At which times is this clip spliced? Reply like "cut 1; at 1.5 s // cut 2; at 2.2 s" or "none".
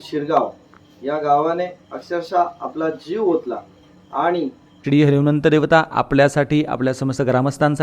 cut 1; at 4.8 s